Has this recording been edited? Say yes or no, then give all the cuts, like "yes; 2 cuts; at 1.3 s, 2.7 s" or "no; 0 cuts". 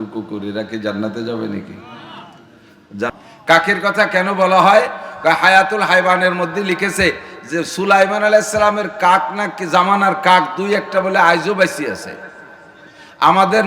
yes; 1 cut; at 3.1 s